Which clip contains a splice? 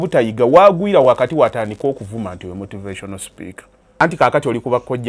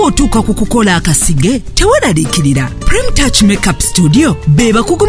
first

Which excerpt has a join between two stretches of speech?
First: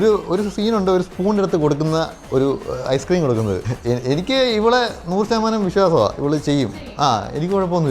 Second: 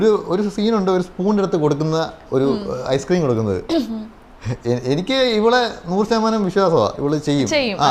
first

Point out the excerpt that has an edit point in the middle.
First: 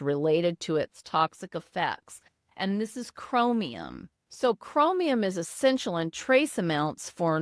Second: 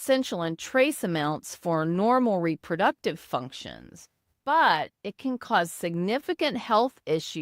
second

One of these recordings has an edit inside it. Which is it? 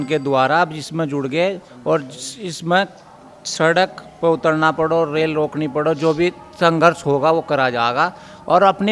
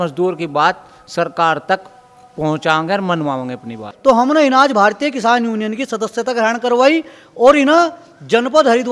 second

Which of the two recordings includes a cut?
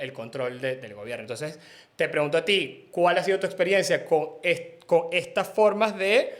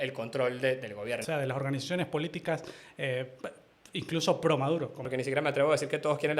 second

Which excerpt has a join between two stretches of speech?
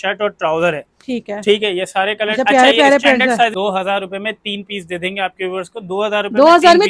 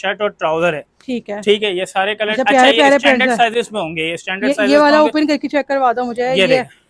first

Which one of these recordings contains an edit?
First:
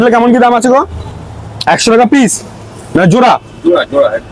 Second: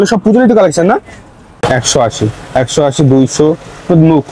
second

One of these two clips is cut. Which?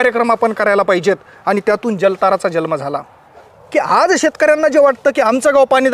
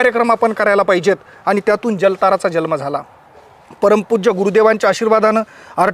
first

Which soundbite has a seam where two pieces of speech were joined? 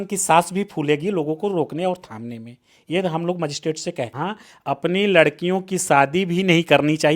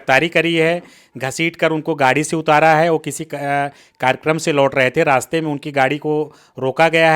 first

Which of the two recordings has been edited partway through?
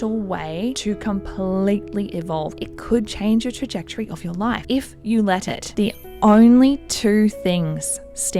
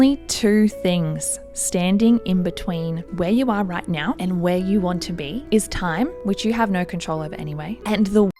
first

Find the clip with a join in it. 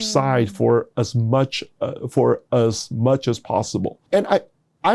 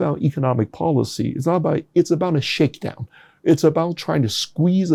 first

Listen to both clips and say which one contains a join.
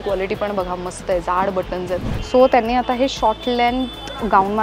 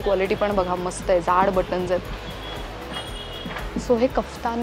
first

